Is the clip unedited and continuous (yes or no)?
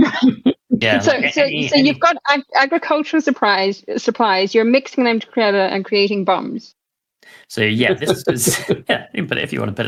yes